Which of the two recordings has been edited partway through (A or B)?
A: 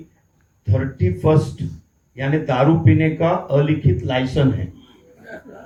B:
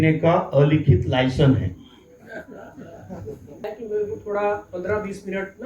B